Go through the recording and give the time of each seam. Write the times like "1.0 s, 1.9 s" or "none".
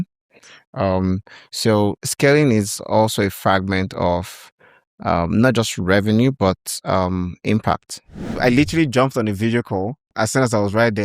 2.0 s, 8.3 s, 10.1 s

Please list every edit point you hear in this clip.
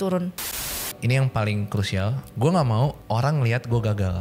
0.8 s, 2.2 s, 3.0 s

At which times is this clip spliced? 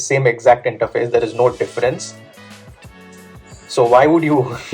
2.1 s, 3.5 s

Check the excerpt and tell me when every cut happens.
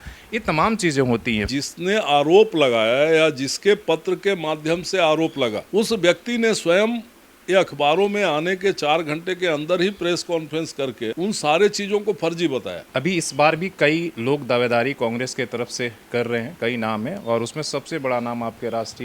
1.4 s, 12.8 s

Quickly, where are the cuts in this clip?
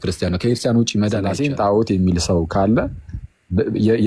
1.3 s

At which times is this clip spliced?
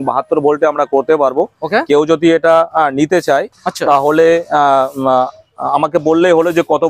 none

